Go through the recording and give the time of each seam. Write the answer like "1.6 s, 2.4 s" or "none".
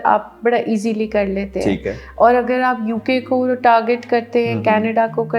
none